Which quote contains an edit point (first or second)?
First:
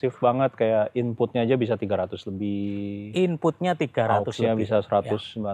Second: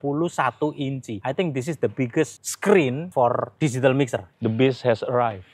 second